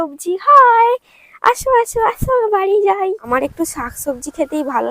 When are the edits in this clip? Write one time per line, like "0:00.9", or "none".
0:03.2